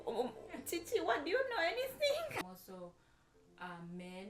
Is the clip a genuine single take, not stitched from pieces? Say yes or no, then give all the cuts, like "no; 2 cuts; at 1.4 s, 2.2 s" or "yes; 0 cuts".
no; 1 cut; at 2.6 s